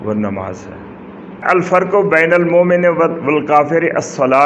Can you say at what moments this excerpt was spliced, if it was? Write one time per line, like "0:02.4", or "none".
0:01.4